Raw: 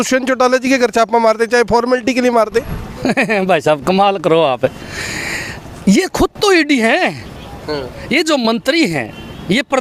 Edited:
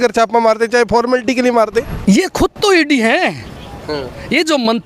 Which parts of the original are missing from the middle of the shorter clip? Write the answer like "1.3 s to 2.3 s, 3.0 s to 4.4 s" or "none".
2.7 s to 5.7 s